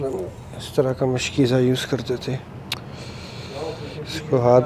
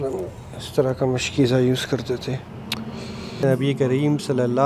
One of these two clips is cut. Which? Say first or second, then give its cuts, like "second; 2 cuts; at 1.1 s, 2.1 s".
second; 1 cut; at 3.4 s